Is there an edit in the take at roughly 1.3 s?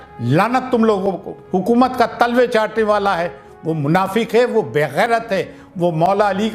yes; 1 cut; at 1.3 s

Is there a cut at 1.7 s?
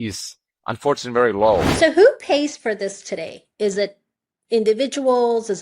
yes; 1 cut; at 1.7 s

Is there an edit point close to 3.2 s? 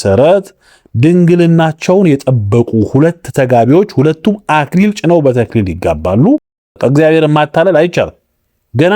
no; 1 cut; at 6.6 s

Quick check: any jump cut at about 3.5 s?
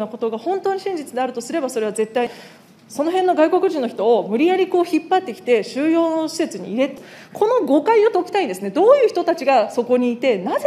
no; 2 cuts; at 2.3 s, 6.9 s

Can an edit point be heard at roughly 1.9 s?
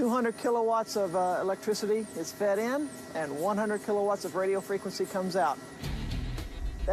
no; 1 cut; at 3.4 s

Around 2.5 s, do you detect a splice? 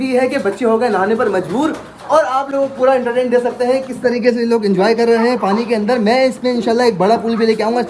no; 0 cuts

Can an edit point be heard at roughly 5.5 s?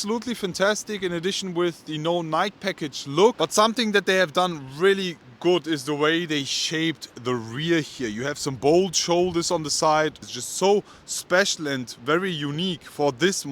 no; 2 cuts; at 3.3 s, 10.3 s

